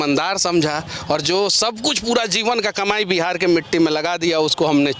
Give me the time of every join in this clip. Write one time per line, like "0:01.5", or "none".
none

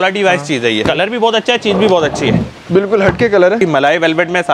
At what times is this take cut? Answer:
0:00.8
0:03.6

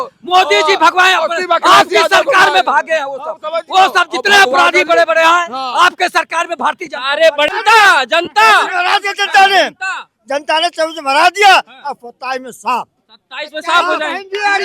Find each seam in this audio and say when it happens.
0:07.5

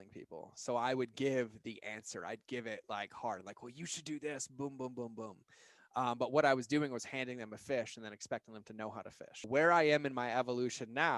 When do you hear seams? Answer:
0:09.5

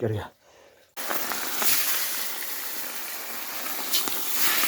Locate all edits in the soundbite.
0:01.0

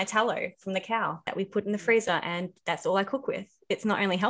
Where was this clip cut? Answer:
0:01.2

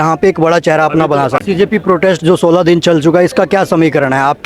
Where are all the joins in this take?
0:01.4

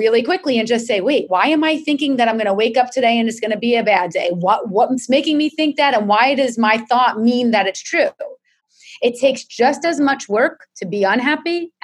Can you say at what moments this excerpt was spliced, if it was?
0:08.6

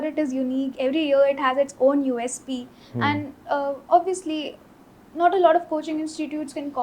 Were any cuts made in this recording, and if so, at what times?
none

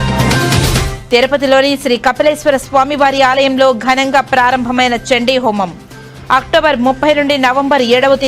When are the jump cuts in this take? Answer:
0:00.9

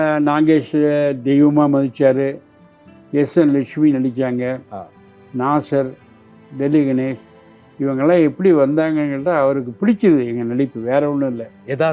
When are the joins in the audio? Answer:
none

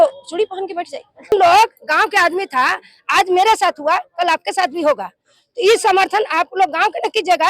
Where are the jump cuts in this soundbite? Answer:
0:01.3

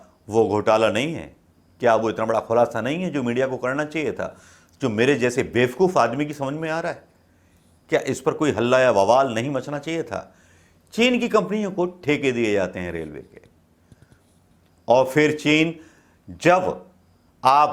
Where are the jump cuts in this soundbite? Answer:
none

